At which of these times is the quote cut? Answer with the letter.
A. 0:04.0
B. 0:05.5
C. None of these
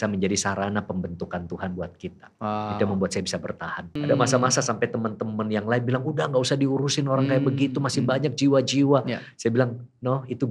A